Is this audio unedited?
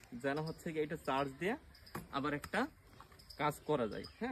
yes; 0 cuts

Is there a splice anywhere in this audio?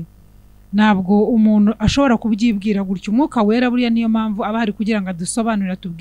no; 0 cuts

